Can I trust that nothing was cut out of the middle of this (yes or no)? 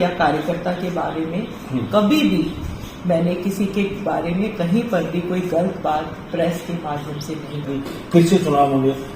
no